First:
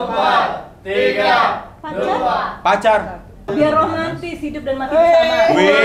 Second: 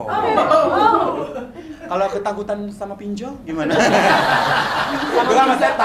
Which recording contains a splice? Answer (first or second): first